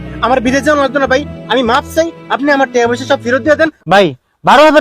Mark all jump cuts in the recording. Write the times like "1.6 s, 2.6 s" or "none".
3.8 s